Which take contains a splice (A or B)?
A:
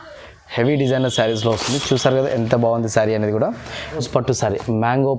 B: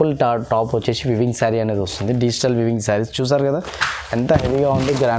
A